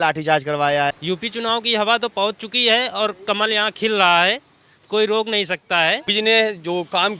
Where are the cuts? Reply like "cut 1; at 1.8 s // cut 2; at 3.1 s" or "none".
cut 1; at 1.0 s // cut 2; at 6.1 s